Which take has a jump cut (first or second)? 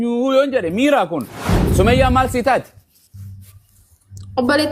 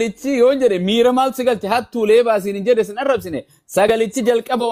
first